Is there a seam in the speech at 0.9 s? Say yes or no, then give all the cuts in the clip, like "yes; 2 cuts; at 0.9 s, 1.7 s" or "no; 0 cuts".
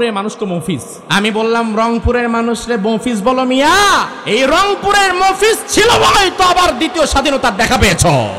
yes; 2 cuts; at 0.9 s, 4.2 s